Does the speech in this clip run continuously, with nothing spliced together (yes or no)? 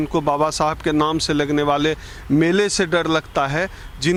yes